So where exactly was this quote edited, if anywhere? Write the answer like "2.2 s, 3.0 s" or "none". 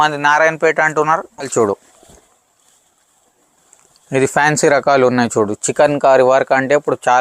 1.4 s